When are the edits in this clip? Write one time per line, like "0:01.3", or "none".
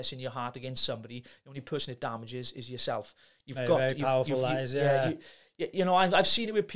none